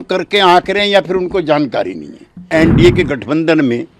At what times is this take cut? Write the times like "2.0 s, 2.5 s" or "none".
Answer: 2.5 s